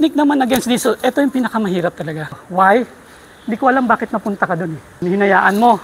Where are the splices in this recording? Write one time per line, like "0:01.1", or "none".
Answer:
0:02.4
0:04.9